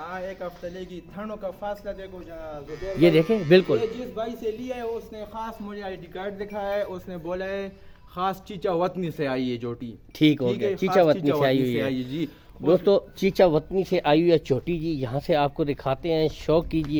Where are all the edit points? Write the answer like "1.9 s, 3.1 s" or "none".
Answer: none